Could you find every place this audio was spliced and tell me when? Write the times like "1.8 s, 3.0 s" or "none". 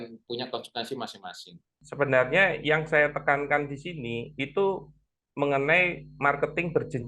1.8 s